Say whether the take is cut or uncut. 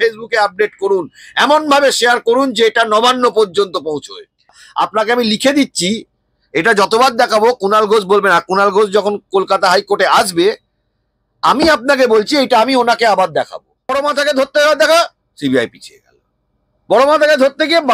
cut